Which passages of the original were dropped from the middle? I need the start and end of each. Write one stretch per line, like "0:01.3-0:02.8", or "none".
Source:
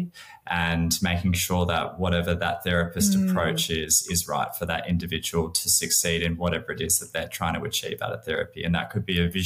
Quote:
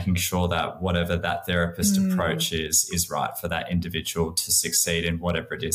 none